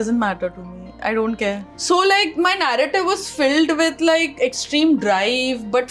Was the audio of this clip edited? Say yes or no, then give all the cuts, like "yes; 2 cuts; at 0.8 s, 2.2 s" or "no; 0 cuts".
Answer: yes; 1 cut; at 1.7 s